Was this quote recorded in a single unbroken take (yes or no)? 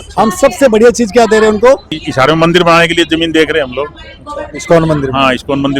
no